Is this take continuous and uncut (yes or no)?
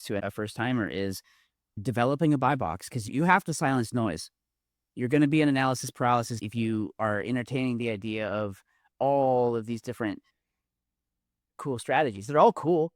yes